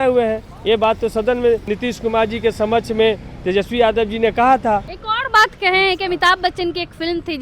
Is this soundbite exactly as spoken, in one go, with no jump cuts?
no; 2 cuts; at 1.7 s, 5.0 s

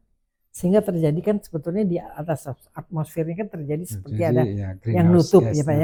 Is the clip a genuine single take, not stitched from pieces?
yes; 0 cuts

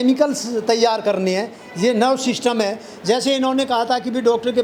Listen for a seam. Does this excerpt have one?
no; 0 cuts

